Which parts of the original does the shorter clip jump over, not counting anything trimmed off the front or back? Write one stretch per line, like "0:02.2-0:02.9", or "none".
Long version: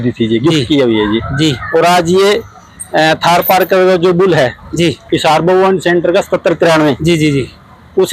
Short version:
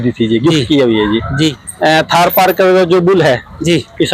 0:01.6-0:02.7